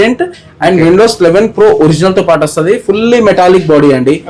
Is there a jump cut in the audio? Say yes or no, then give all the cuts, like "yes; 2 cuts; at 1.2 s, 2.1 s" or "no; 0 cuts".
no; 0 cuts